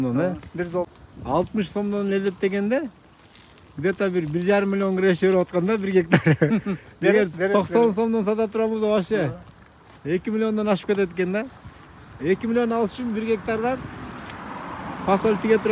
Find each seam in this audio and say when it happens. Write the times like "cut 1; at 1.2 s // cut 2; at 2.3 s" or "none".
cut 1; at 0.9 s